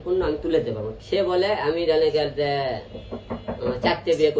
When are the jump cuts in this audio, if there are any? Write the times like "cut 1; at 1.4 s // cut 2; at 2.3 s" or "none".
cut 1; at 0.9 s

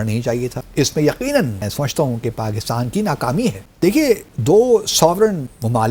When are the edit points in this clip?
none

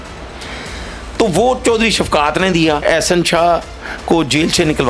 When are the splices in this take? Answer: cut 1; at 2.8 s

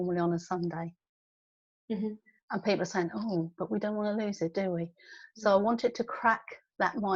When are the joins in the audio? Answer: none

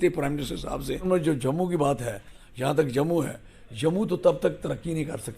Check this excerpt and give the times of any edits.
cut 1; at 1.0 s

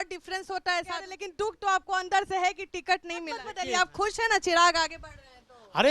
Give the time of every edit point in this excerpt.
cut 1; at 1.2 s // cut 2; at 3.5 s

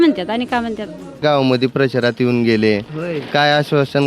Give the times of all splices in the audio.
cut 1; at 1.2 s

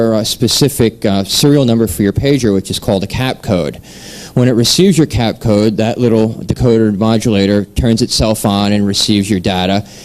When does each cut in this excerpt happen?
none

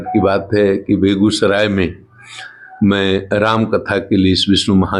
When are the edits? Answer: none

